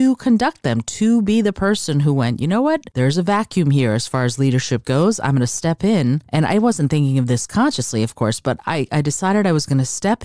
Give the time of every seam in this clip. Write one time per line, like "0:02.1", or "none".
0:02.9
0:06.2